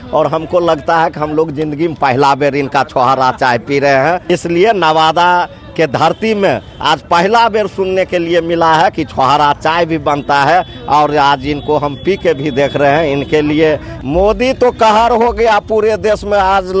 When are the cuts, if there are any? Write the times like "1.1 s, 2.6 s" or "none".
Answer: 13.9 s